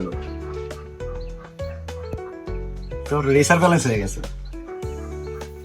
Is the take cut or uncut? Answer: uncut